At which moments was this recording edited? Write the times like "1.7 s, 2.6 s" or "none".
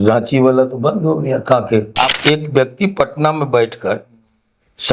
2.1 s